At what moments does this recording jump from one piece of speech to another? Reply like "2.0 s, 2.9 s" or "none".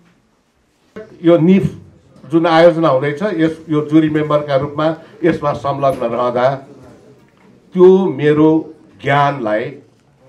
1.1 s